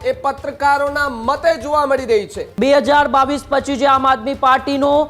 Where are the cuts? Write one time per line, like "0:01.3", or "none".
0:02.4